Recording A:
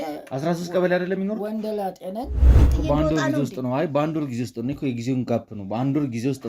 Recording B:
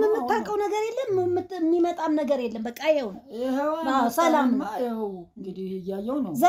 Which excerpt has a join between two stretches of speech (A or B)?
A